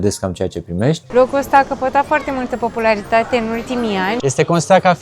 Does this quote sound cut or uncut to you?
cut